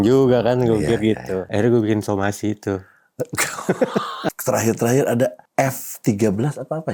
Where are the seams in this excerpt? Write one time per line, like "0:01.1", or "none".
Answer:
0:01.4
0:04.3
0:05.4